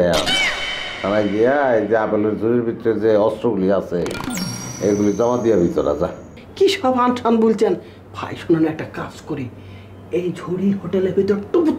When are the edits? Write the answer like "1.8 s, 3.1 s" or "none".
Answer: 6.4 s

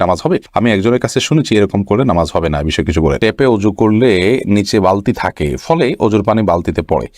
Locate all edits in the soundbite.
3.2 s

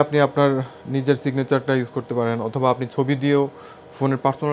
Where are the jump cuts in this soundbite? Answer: none

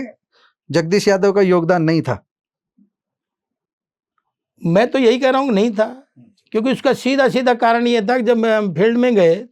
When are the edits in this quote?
none

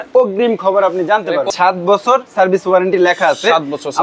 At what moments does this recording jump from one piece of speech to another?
1.5 s

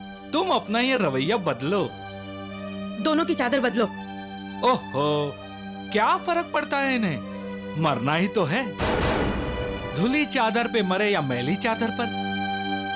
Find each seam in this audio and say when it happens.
9.8 s

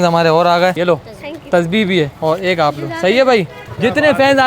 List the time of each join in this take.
0.8 s, 2.1 s, 3.6 s

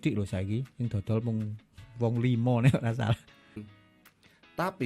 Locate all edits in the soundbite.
3.6 s

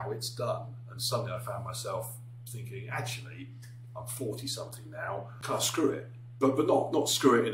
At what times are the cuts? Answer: 5.3 s

